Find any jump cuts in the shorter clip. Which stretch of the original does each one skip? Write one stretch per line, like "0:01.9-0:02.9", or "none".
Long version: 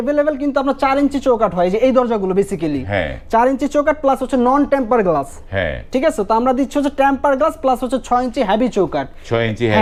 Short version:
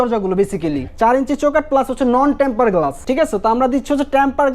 0:02.8-0:03.2
0:05.3-0:05.8